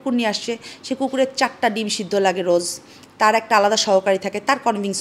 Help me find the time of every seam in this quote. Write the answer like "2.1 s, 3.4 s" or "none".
none